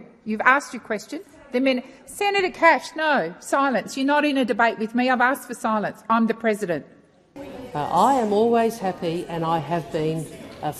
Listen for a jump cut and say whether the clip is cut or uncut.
uncut